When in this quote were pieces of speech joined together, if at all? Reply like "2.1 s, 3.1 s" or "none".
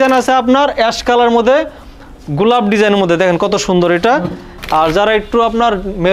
4.5 s